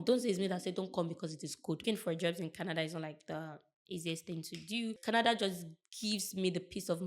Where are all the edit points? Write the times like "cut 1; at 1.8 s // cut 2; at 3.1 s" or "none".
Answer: cut 1; at 1.8 s // cut 2; at 5.0 s